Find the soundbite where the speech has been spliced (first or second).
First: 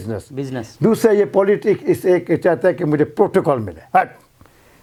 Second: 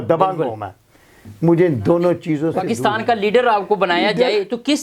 second